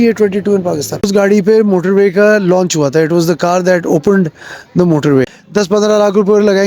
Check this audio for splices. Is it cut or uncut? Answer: cut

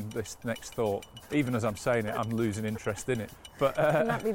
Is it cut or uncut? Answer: cut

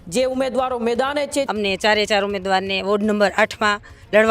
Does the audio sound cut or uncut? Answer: cut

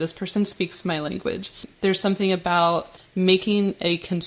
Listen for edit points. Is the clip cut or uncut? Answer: cut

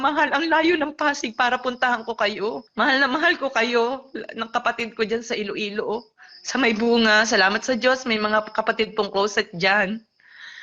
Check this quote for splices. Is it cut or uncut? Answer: cut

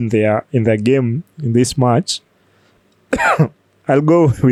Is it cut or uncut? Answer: uncut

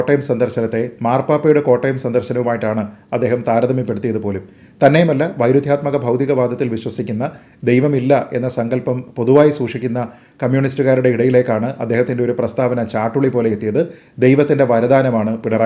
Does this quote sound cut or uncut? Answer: uncut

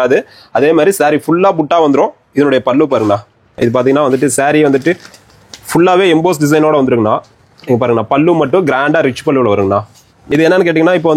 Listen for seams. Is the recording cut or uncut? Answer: cut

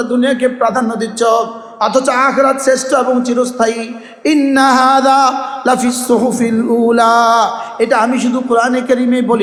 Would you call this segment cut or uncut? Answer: uncut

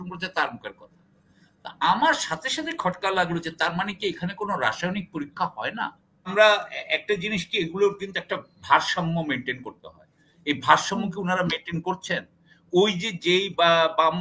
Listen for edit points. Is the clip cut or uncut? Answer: cut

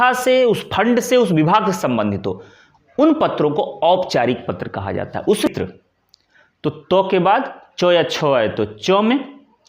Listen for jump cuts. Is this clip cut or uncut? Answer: cut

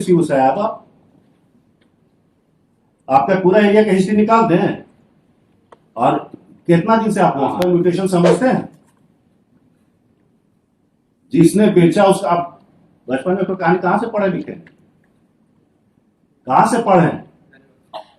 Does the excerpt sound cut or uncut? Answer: cut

